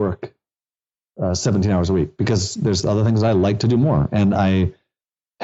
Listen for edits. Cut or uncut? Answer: uncut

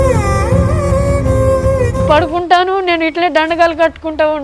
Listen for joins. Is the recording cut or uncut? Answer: cut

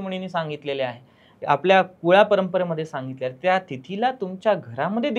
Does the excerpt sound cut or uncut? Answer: uncut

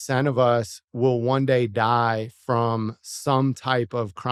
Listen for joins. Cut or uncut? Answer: uncut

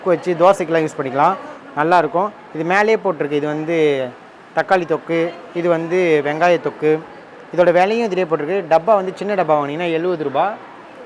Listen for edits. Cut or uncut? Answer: uncut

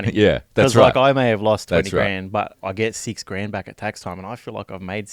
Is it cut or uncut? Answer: uncut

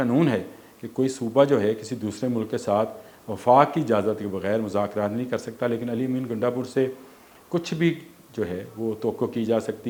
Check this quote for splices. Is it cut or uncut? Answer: uncut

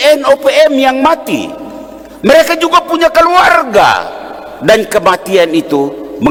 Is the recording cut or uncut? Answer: uncut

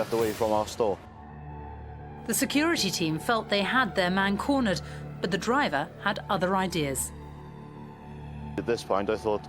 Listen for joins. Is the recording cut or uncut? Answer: cut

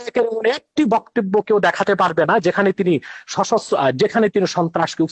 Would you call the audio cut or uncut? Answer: uncut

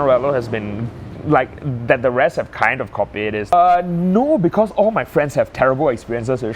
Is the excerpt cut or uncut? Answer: cut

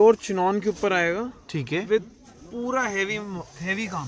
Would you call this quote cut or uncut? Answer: uncut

